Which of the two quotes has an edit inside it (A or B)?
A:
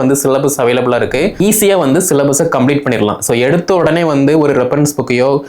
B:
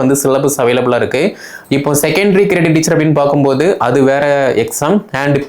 A